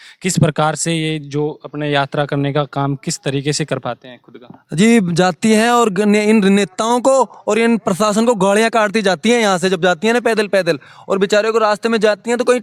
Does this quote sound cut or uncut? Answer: uncut